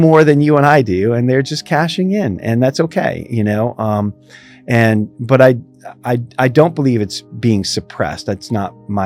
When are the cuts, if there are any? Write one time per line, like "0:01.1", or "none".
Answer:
none